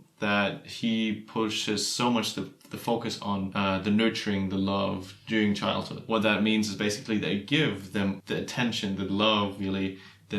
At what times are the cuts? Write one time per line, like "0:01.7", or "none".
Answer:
0:03.5
0:06.0
0:08.2